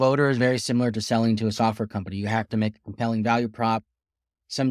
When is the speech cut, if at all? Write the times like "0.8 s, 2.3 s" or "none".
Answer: none